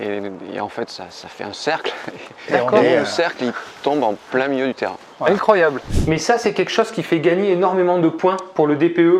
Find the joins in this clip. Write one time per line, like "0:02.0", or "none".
0:05.9